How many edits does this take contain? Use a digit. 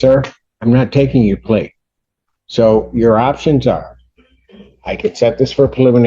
0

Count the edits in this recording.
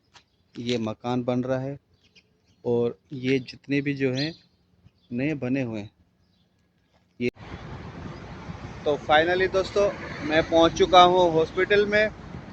1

